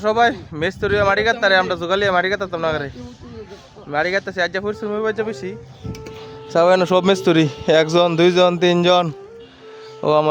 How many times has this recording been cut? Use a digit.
0